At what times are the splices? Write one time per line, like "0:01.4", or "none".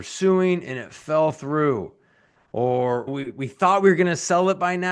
0:03.1